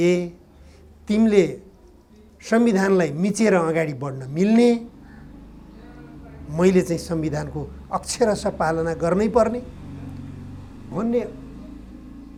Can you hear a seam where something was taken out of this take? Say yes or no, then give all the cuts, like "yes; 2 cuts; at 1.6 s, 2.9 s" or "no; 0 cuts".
no; 0 cuts